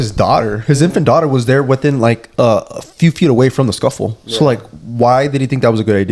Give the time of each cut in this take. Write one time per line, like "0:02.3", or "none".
none

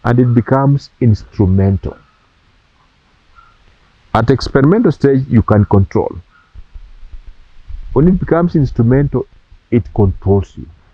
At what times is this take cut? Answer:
none

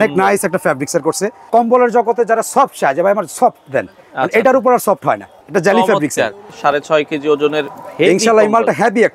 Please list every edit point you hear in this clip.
0:01.5
0:05.4
0:06.5

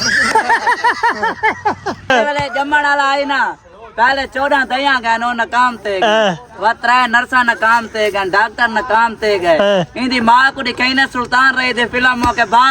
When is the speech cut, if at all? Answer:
0:02.1

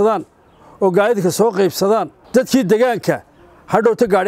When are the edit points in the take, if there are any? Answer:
none

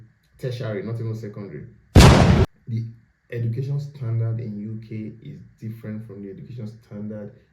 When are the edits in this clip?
0:01.7
0:02.4

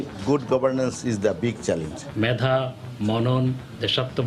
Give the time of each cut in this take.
0:02.0

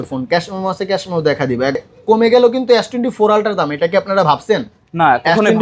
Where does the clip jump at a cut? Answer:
0:01.8

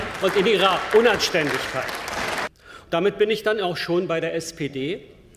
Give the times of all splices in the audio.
0:02.5

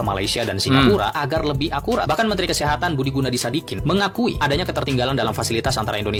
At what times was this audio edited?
none

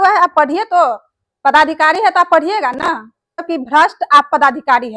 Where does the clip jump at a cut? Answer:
0:03.5

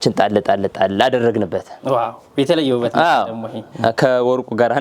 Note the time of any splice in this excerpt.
none

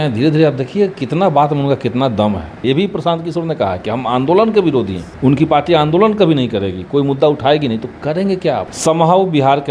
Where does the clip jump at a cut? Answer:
0:02.6
0:05.0
0:08.7

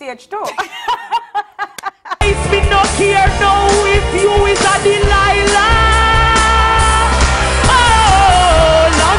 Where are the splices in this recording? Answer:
0:02.2

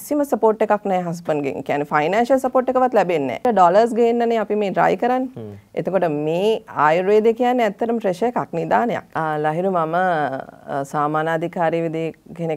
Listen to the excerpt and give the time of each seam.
0:03.4
0:09.1

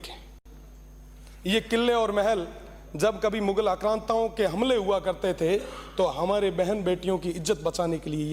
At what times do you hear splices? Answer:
none

